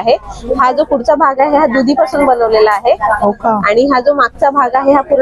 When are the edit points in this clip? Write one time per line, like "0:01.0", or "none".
none